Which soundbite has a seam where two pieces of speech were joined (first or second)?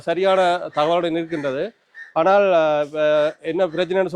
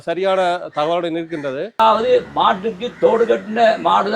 second